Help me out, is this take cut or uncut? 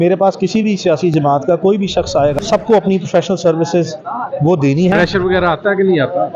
cut